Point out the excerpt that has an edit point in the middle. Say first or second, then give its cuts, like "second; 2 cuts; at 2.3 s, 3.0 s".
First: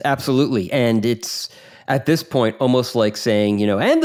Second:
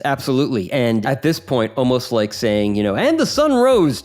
second; 1 cut; at 1.0 s